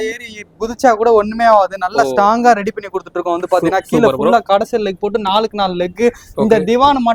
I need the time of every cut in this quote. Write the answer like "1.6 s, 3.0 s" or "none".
none

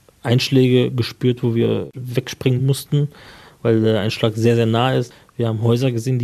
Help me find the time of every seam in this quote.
1.9 s, 5.1 s

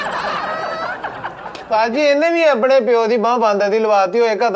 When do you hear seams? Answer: 1.6 s

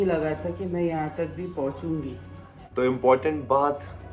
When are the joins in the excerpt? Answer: 2.6 s

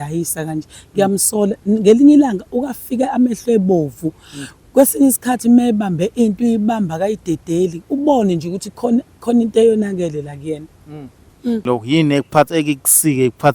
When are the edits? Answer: 11.6 s

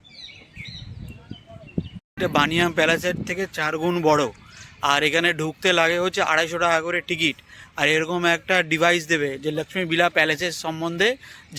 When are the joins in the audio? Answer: 2.2 s

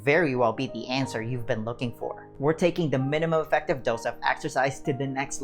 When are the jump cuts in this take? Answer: 2.2 s

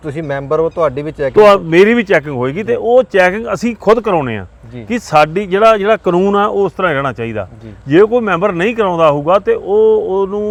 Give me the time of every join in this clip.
none

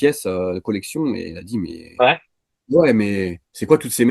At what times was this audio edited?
none

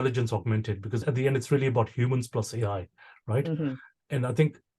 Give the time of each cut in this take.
1.0 s, 3.9 s

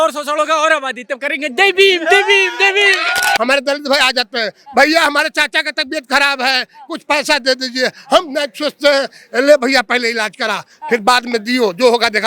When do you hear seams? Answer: 3.4 s

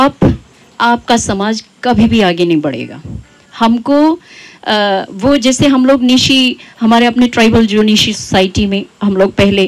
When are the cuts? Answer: none

